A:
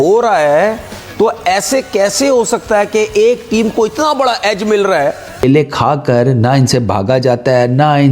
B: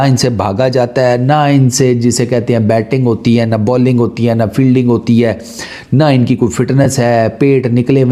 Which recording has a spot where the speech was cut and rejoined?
A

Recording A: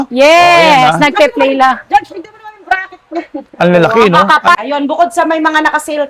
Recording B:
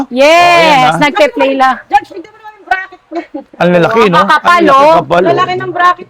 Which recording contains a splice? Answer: A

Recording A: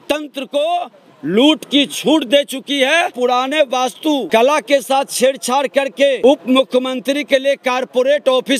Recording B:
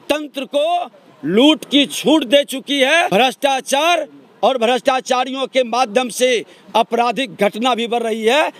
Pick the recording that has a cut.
A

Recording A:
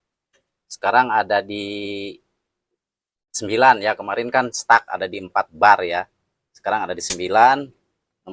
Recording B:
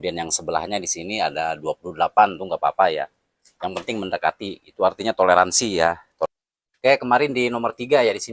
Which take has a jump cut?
B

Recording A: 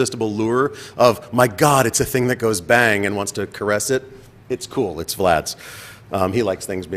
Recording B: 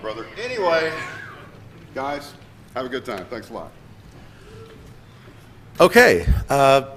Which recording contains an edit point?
A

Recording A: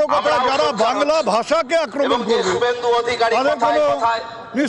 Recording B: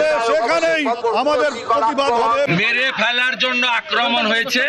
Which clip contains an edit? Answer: B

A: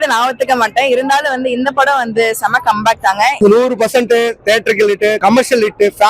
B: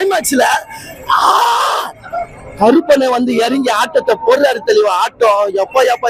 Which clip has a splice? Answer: A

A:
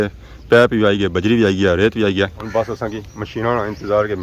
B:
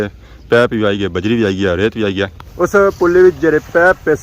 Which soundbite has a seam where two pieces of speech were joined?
B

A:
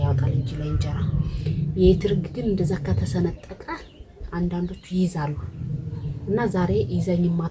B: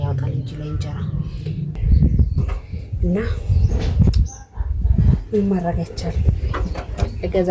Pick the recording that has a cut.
B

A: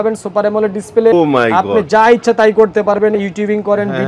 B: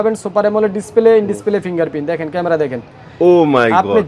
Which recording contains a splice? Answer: A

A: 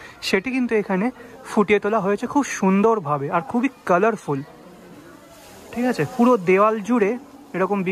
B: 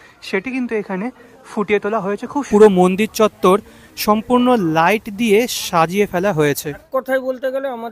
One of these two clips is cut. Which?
B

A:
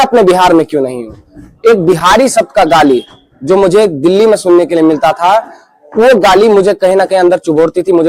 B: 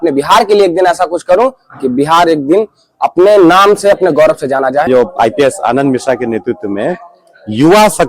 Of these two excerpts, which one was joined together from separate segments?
B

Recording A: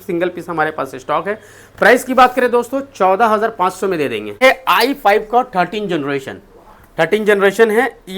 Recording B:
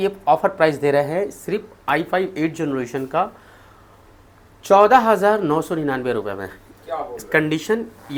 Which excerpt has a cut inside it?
A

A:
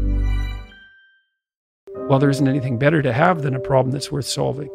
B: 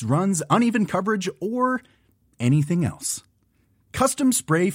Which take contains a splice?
A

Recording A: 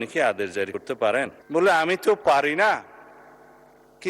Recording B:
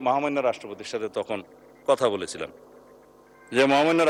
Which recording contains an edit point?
A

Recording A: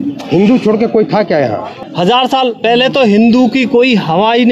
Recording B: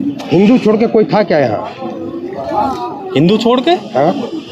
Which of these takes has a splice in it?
A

